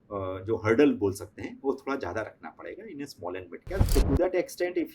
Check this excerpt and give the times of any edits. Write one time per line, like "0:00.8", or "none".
0:03.9